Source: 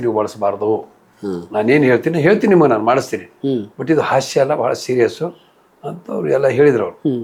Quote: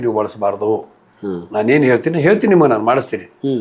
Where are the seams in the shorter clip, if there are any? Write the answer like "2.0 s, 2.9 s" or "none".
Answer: none